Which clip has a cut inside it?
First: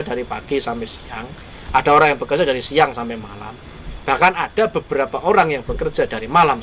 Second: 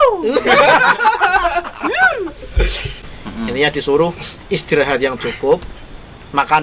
second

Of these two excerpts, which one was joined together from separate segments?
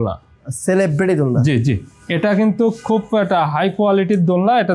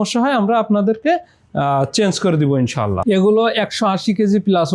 second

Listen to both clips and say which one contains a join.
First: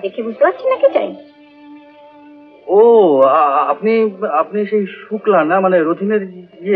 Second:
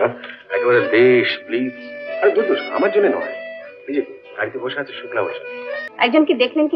second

